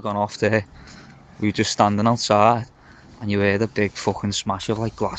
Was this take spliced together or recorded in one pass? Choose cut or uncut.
uncut